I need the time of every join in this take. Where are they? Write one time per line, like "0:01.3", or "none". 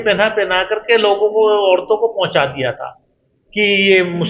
none